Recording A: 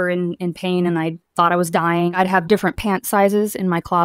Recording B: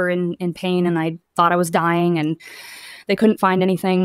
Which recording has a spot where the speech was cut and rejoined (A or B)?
A